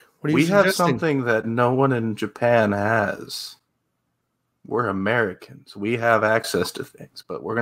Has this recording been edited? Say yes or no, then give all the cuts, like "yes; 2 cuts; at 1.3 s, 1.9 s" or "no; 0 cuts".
no; 0 cuts